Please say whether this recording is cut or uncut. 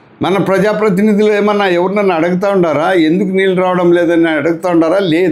uncut